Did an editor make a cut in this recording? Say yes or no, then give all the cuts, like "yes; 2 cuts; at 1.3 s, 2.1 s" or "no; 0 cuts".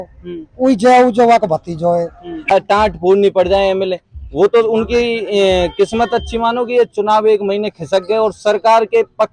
yes; 1 cut; at 2.5 s